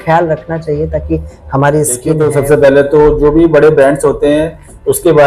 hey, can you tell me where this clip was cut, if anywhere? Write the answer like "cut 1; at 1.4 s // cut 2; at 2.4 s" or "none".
cut 1; at 2.2 s